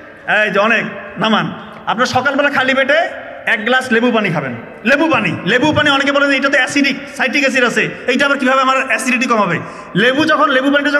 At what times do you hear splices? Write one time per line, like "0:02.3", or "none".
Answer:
none